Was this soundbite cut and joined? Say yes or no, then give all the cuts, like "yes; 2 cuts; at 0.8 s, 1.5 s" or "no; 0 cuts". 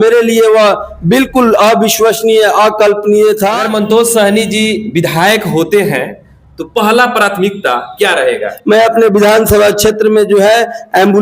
yes; 2 cuts; at 3.7 s, 8.5 s